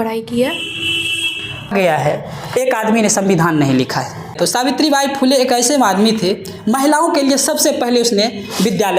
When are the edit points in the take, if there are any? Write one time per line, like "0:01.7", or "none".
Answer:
0:01.7
0:04.3